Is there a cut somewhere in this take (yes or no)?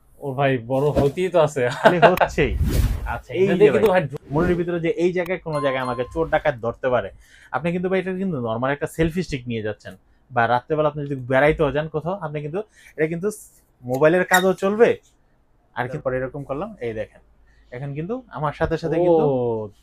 yes